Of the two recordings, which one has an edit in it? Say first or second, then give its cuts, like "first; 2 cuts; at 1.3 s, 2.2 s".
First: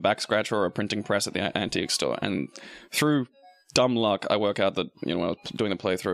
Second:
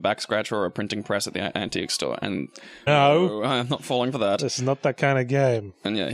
first; 1 cut; at 2.6 s